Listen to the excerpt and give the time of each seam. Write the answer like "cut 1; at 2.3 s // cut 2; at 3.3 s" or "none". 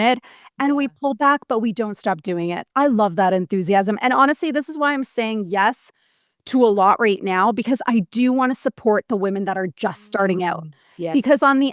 none